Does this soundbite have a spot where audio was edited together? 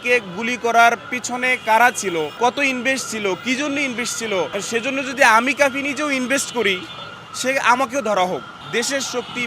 yes; 3 cuts; at 2.3 s, 4.5 s, 8.6 s

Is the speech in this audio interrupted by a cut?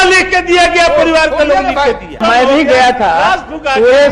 yes; 1 cut; at 2.2 s

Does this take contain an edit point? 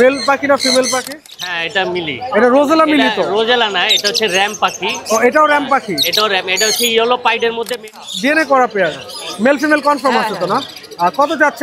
yes; 2 cuts; at 1.2 s, 7.9 s

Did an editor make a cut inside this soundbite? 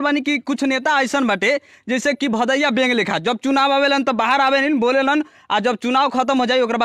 no; 0 cuts

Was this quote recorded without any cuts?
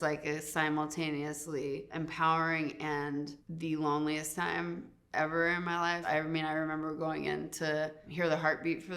no; 1 cut; at 6.0 s

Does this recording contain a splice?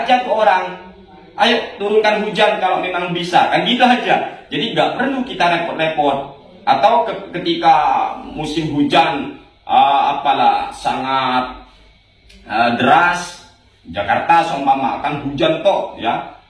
no; 0 cuts

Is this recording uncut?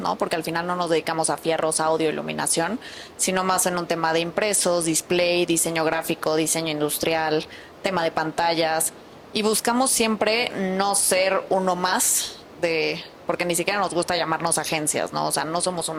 yes; 0 cuts

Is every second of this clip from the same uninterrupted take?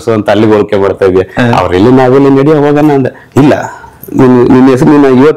yes; 0 cuts

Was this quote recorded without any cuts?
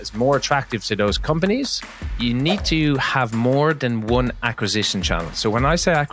no; 1 cut; at 2.0 s

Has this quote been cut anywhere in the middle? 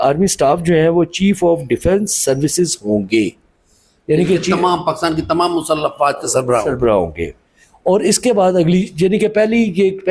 no; 0 cuts

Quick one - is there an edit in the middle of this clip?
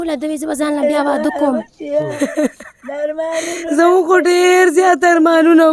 yes; 1 cut; at 2.1 s

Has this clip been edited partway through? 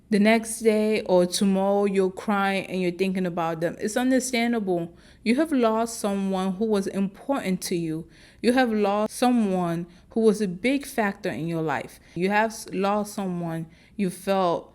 yes; 2 cuts; at 9.1 s, 12.1 s

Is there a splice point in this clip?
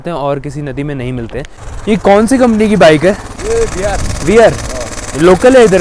yes; 2 cuts; at 1.6 s, 3.3 s

